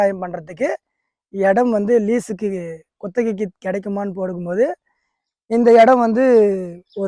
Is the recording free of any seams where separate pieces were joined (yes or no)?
yes